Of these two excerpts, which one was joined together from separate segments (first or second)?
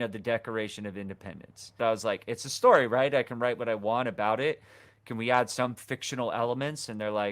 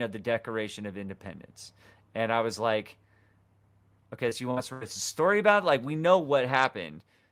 first